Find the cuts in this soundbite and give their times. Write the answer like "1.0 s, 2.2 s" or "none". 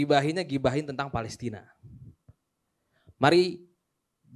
none